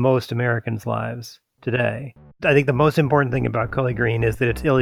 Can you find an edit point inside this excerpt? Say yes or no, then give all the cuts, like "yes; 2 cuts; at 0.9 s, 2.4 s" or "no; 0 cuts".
yes; 1 cut; at 2.3 s